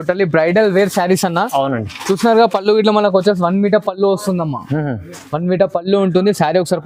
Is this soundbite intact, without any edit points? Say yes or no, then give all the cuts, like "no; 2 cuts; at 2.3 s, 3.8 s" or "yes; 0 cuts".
yes; 0 cuts